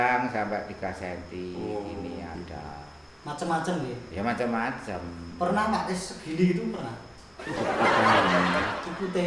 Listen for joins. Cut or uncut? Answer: uncut